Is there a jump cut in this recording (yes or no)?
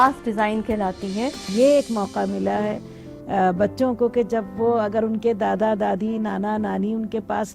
yes